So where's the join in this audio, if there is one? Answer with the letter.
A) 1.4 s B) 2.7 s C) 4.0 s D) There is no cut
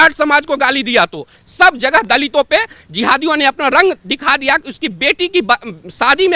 A